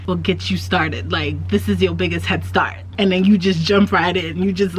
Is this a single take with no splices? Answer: no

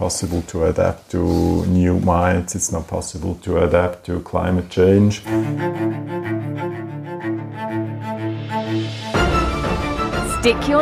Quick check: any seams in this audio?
yes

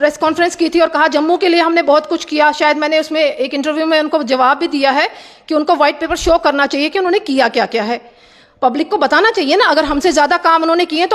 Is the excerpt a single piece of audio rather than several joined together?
yes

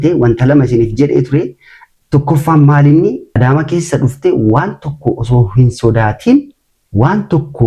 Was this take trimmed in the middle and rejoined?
yes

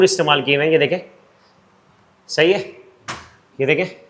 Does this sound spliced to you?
no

